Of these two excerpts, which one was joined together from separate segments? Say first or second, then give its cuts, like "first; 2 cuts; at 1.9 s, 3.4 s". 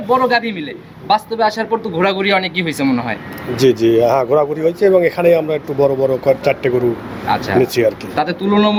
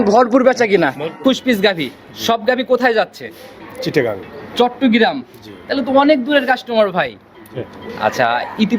second; 1 cut; at 1.2 s